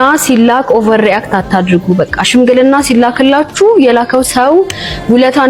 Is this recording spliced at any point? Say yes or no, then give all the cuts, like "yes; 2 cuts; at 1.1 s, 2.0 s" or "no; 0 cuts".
no; 0 cuts